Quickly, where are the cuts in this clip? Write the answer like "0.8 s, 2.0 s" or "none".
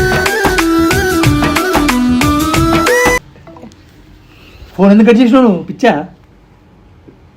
none